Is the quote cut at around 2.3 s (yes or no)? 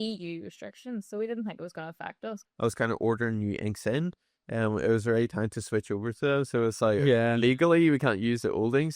yes